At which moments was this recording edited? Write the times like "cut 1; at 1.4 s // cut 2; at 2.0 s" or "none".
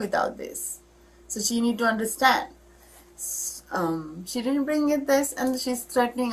none